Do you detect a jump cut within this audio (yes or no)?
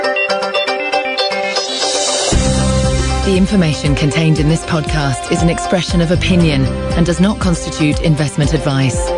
no